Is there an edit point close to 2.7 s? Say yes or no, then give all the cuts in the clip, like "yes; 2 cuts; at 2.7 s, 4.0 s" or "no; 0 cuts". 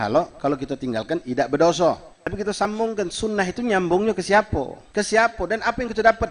yes; 2 cuts; at 2.7 s, 4.8 s